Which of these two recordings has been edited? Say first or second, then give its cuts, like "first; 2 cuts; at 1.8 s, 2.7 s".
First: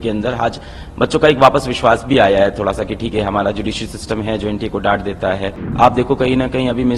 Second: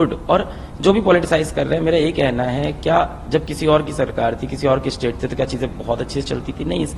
first; 1 cut; at 5.6 s